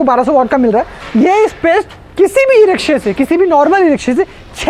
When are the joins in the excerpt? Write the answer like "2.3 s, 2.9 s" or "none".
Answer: 1.0 s

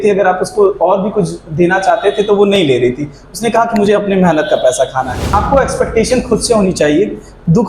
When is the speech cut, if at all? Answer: 5.2 s

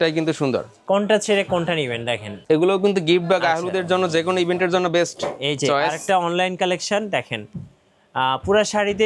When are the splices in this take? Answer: 2.4 s

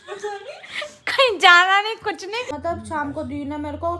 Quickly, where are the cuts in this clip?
2.5 s

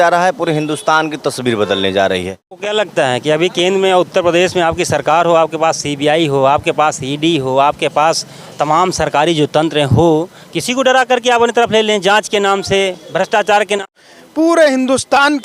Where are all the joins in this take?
2.6 s, 13.9 s

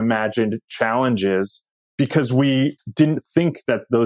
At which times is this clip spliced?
1.8 s

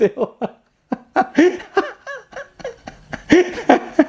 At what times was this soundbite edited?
none

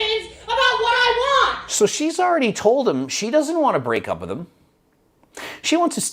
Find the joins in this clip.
none

